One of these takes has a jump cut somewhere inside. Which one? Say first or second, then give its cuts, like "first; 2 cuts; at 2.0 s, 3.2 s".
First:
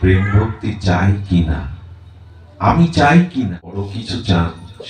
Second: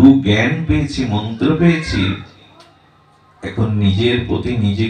first; 1 cut; at 4.0 s